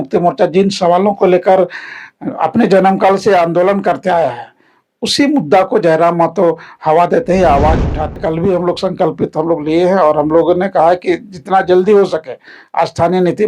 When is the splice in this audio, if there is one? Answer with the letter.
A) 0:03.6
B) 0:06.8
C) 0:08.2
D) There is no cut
C